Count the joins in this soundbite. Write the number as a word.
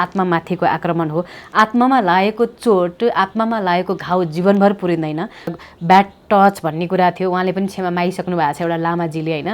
one